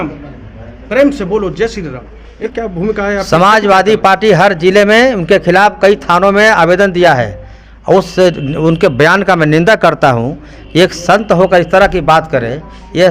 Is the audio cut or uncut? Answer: cut